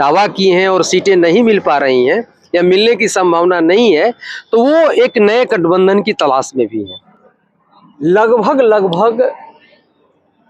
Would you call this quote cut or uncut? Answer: cut